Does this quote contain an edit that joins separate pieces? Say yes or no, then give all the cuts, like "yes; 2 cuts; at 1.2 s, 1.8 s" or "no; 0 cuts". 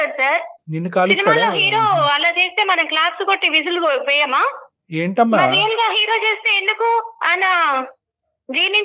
no; 0 cuts